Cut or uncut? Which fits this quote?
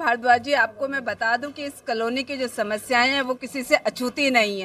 uncut